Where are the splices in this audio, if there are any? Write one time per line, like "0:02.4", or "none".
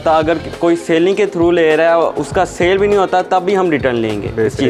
none

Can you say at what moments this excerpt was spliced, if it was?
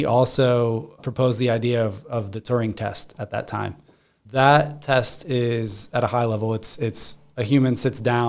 0:04.2

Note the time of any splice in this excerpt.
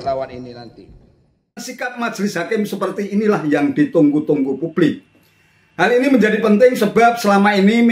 0:01.7

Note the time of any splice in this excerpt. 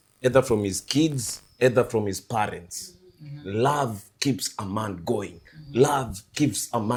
none

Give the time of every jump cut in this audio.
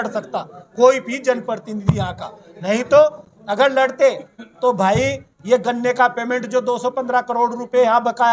none

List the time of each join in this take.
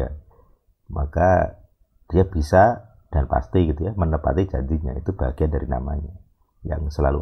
none

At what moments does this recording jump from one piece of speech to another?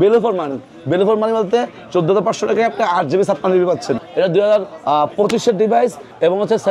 0:04.1

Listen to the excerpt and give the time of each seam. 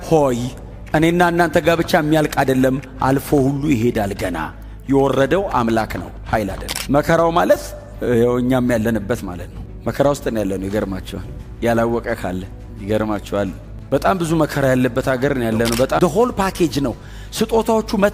0:06.7
0:16.0

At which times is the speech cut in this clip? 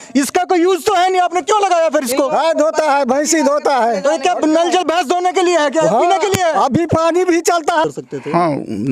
0:07.8

